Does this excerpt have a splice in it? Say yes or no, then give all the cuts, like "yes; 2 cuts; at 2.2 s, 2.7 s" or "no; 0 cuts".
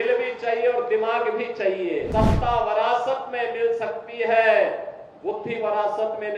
yes; 1 cut; at 2.1 s